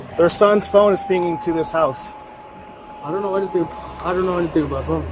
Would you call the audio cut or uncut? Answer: uncut